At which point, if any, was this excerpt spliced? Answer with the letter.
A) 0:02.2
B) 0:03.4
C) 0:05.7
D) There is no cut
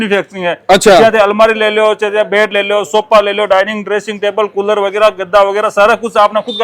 D